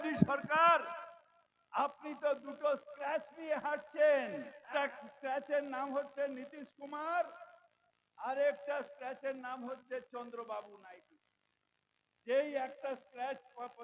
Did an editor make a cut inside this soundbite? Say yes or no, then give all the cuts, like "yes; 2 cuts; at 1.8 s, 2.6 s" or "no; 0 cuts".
yes; 1 cut; at 4.7 s